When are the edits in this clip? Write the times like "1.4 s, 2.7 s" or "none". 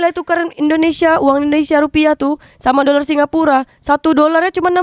none